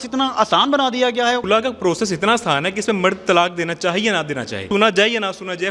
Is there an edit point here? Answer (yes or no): yes